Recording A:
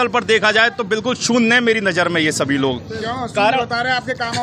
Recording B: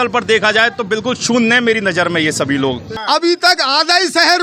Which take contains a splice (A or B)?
B